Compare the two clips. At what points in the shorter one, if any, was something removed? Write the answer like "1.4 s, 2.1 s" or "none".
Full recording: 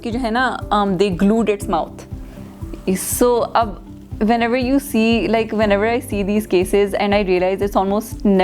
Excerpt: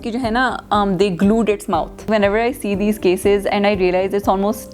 2.0 s